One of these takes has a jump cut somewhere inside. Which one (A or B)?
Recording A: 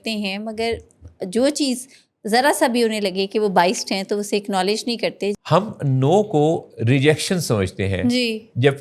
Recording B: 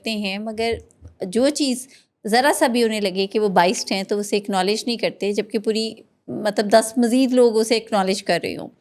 A